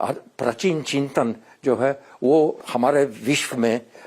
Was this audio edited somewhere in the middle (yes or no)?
yes